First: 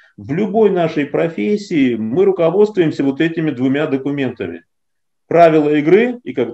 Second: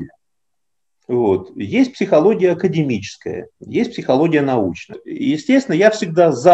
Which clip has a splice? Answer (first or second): second